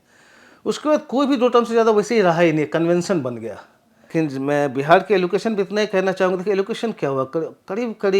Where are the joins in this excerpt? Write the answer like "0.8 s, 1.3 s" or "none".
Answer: 4.1 s